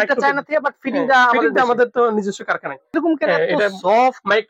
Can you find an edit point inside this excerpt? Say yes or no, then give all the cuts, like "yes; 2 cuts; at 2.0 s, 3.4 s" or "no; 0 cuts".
yes; 1 cut; at 2.9 s